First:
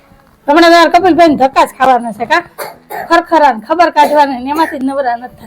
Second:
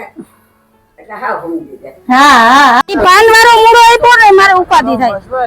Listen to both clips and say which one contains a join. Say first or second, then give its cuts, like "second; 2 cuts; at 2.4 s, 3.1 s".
second; 1 cut; at 2.8 s